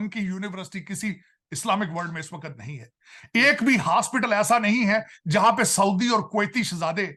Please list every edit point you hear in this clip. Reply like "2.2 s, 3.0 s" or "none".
none